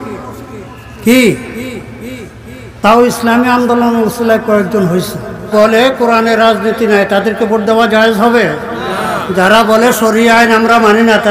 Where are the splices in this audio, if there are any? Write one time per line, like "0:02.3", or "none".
0:05.5